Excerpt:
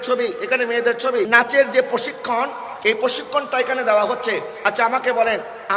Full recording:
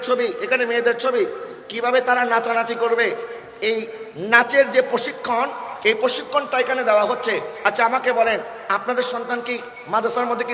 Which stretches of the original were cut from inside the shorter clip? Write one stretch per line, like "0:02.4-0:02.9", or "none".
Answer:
0:01.3-0:04.3